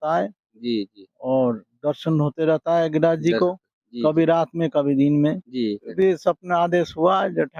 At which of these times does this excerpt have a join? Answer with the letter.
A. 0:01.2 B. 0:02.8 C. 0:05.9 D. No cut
C